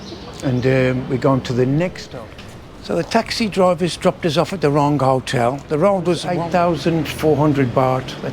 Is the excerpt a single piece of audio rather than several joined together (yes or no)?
no